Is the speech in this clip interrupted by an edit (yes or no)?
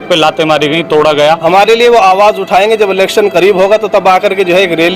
yes